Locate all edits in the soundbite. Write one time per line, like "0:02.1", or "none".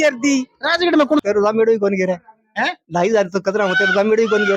0:01.2